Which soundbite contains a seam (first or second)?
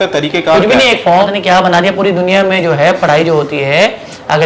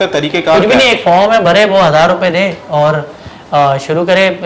first